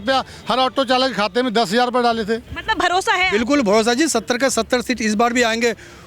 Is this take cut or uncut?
cut